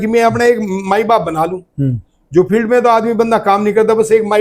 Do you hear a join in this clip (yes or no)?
no